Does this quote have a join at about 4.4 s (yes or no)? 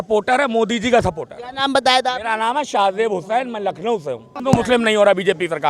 yes